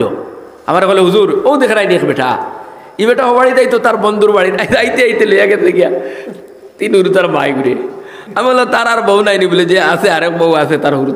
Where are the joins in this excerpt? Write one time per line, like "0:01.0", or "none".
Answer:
none